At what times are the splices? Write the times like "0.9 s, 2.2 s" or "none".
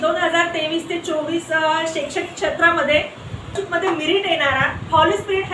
3.6 s